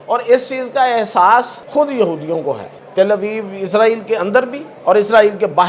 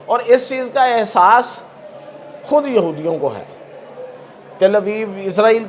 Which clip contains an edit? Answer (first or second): first